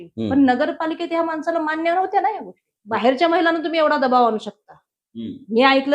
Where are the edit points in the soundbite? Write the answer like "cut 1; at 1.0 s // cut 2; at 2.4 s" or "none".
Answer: cut 1; at 2.7 s

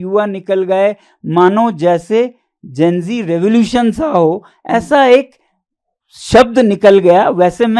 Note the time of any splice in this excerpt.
none

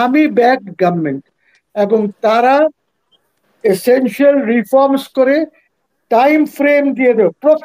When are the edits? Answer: none

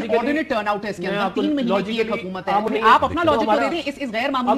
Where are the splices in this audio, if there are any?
cut 1; at 2.7 s

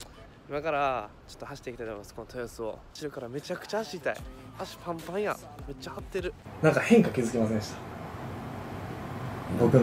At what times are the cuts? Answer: cut 1; at 2.9 s // cut 2; at 6.5 s

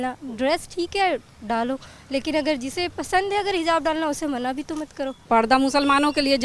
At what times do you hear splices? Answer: cut 1; at 5.2 s

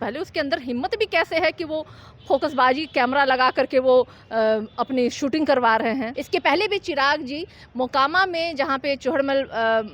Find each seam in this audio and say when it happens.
cut 1; at 6.1 s

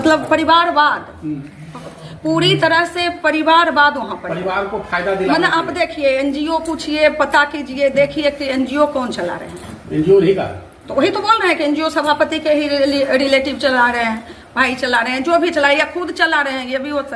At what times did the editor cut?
none

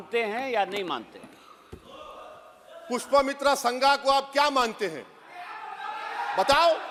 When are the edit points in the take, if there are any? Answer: none

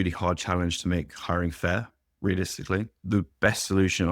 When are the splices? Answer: cut 1; at 3.0 s

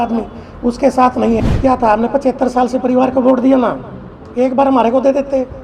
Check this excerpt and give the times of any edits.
cut 1; at 1.4 s

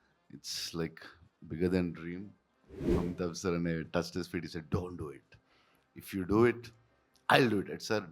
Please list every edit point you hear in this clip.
cut 1; at 2.9 s

